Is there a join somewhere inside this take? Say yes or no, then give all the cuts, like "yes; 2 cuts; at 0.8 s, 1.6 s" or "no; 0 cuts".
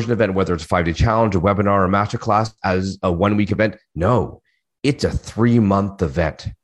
yes; 1 cut; at 2.5 s